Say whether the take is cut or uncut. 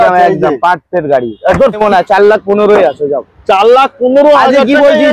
cut